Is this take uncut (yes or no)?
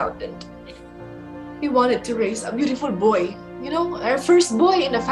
yes